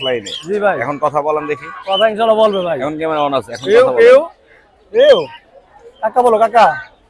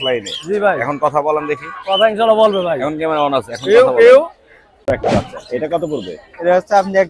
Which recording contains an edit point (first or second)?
second